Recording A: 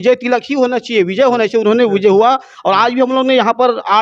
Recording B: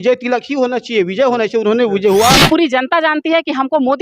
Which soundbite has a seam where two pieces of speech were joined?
B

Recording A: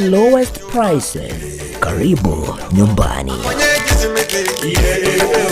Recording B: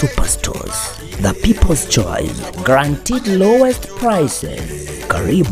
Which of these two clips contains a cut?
A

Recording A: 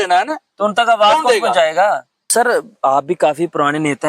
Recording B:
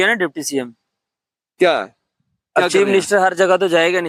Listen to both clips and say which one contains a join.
A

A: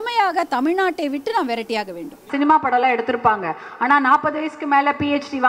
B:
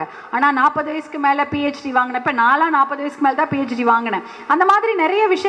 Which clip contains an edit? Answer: A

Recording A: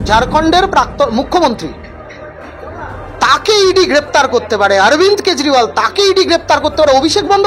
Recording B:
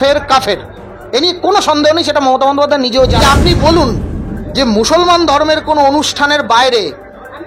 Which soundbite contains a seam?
B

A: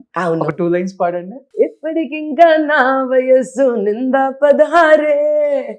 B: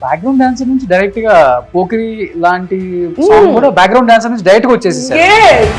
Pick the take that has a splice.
A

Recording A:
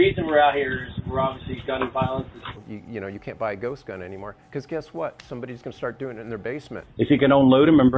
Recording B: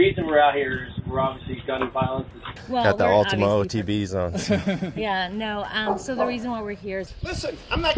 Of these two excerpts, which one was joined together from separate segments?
B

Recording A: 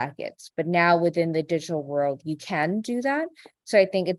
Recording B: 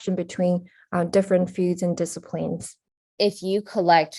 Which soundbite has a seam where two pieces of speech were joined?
B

